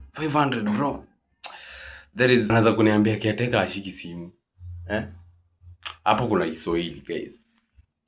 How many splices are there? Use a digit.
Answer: 1